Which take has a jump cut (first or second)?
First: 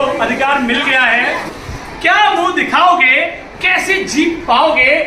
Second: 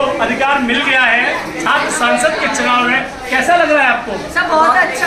first